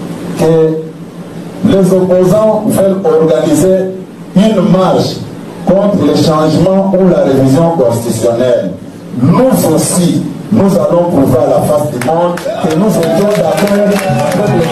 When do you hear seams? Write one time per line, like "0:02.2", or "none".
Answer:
none